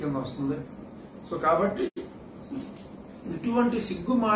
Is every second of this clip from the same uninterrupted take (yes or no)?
no